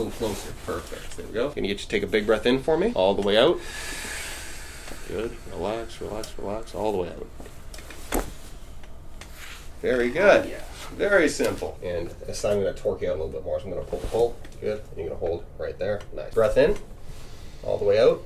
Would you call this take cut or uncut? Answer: cut